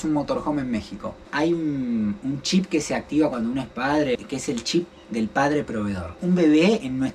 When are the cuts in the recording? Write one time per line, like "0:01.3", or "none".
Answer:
0:01.1
0:04.2
0:06.2